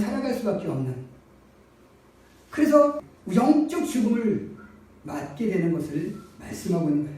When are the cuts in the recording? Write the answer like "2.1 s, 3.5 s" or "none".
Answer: 3.1 s